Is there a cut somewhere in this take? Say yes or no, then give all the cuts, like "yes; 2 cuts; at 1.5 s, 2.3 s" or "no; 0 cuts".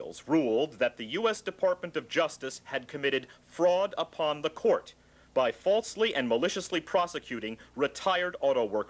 yes; 1 cut; at 4.6 s